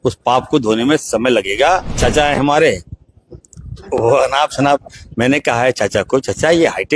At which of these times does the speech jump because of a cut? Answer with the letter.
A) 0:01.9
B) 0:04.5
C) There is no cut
A